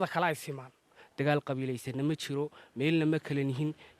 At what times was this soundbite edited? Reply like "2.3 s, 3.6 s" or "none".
1.0 s